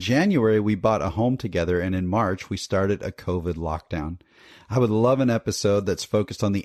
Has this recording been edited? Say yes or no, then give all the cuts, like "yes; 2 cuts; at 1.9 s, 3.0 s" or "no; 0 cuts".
no; 0 cuts